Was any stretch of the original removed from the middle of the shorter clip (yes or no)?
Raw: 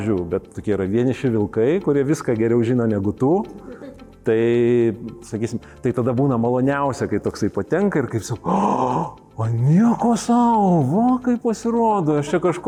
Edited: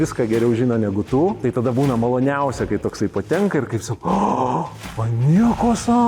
yes